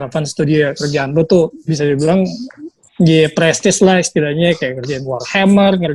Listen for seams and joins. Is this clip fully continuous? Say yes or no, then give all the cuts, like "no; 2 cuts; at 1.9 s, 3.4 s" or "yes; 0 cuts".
yes; 0 cuts